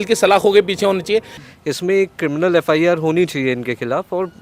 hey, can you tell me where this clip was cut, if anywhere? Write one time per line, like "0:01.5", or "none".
0:01.3